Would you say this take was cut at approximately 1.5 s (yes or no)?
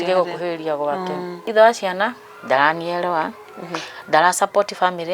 yes